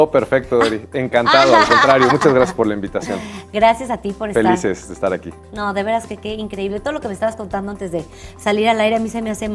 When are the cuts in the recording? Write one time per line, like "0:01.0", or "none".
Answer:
0:07.4

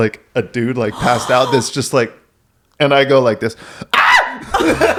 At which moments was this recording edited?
none

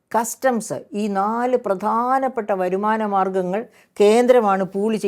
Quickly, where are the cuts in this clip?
none

